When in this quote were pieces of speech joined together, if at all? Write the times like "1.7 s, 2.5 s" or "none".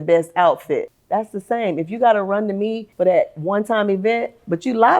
1.0 s, 2.8 s